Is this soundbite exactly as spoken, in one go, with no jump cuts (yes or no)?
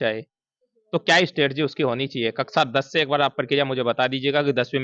yes